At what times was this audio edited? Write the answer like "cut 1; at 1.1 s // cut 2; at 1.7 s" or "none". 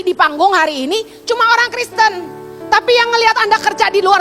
none